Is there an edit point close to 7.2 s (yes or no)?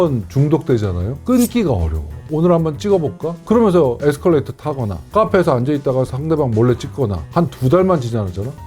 yes